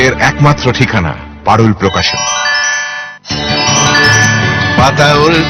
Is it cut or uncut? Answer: uncut